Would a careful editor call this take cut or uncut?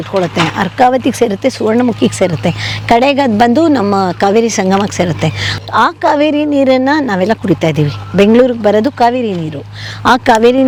uncut